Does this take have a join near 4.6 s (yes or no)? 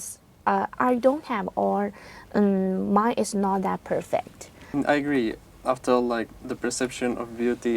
yes